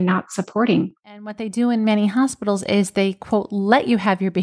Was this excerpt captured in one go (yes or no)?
no